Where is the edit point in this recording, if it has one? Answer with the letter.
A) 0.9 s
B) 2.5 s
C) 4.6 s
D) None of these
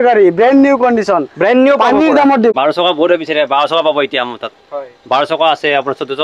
B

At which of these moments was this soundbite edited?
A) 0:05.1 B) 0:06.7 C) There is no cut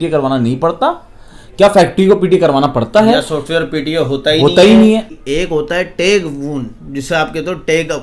A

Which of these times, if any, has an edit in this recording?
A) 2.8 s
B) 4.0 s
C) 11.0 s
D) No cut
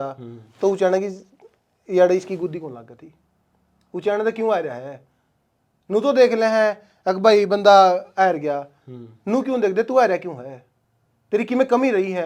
D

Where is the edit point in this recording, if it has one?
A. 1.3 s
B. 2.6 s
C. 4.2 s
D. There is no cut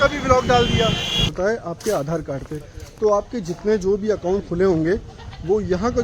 A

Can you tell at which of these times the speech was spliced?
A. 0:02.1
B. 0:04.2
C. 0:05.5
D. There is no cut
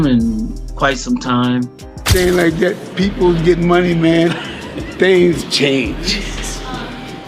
A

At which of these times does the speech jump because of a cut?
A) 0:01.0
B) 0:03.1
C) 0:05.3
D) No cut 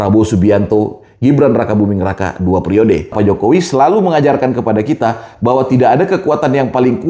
B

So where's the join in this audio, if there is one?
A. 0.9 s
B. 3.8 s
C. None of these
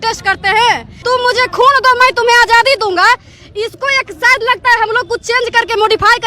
A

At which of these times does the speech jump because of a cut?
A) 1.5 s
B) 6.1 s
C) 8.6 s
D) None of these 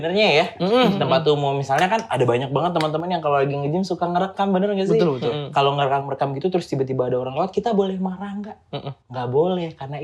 D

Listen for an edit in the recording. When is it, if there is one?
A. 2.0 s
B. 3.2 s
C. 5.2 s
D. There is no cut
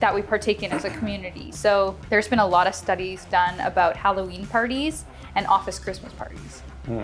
A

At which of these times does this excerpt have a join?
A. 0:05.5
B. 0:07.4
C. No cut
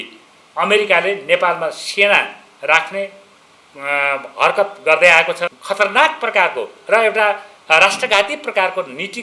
A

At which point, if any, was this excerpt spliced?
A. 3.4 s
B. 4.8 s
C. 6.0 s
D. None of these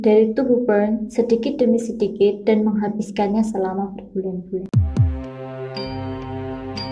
B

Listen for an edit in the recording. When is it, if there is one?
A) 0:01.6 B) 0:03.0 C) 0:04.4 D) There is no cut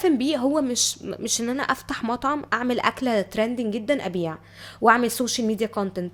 D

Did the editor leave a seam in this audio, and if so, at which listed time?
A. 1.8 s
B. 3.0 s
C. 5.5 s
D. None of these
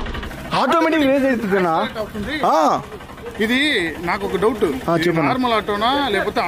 D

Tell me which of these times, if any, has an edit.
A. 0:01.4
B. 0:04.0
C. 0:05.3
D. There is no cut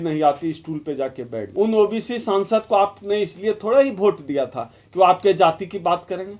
A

